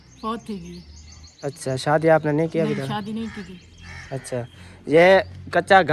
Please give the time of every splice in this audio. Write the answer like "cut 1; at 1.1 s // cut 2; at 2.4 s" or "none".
none